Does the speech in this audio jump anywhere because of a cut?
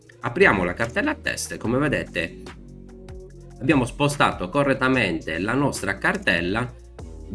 yes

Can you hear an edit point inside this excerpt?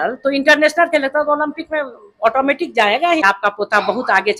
yes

